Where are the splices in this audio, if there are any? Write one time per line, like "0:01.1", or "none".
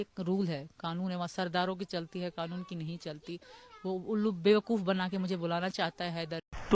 none